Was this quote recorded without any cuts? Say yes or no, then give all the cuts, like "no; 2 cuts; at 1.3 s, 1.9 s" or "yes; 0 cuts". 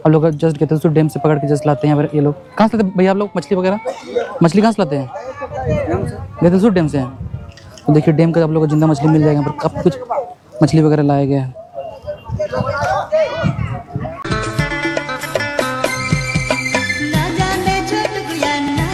yes; 0 cuts